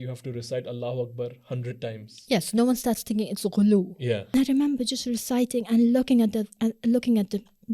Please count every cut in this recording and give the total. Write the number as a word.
one